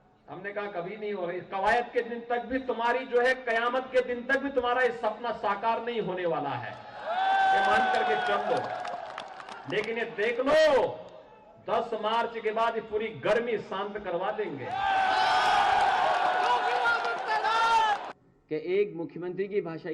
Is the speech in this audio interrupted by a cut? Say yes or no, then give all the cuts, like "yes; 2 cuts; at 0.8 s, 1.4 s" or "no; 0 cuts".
yes; 1 cut; at 18.0 s